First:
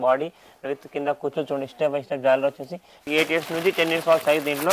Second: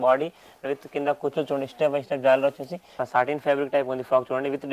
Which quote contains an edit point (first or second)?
second